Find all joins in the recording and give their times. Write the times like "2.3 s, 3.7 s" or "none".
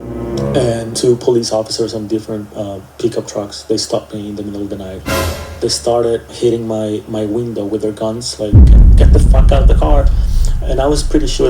0.9 s, 6.3 s